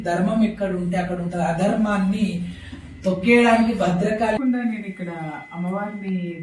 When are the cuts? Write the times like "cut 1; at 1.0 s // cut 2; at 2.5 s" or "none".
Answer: cut 1; at 4.4 s